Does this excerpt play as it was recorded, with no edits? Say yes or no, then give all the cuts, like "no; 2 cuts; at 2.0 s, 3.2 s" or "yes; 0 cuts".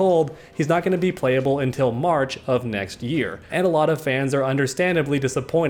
yes; 0 cuts